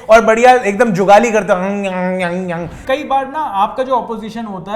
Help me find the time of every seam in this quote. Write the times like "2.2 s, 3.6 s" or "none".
2.8 s